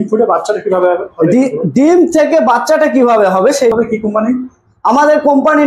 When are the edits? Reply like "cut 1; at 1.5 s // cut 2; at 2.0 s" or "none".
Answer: cut 1; at 3.7 s